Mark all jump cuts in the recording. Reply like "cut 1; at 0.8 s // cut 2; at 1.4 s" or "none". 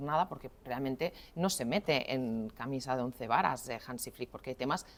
none